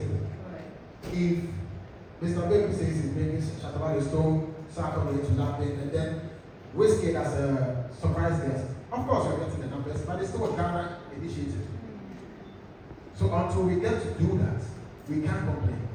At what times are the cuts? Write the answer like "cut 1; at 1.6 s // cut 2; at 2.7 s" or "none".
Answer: none